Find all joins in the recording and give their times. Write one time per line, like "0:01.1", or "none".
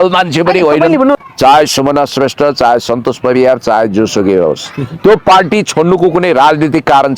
0:01.2